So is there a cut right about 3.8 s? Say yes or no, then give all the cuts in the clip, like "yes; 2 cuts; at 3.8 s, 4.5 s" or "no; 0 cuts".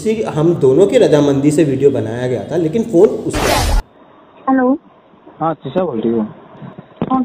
yes; 1 cut; at 3.8 s